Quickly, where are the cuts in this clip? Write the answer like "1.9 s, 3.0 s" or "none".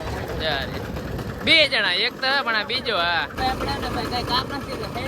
3.3 s